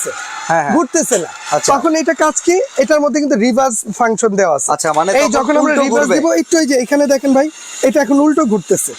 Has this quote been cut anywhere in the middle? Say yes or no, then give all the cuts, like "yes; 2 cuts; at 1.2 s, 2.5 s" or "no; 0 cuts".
no; 0 cuts